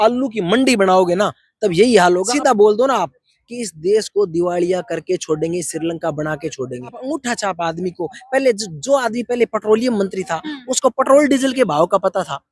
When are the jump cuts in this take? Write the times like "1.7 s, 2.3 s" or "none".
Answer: 2.3 s, 7.0 s